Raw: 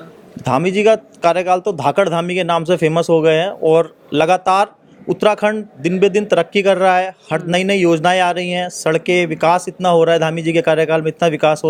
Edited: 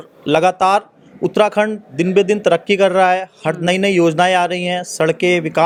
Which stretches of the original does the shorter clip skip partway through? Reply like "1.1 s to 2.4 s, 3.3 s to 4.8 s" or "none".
none